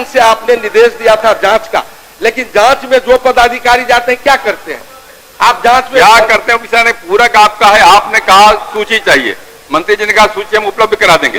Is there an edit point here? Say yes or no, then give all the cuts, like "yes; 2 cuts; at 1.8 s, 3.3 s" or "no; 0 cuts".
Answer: no; 0 cuts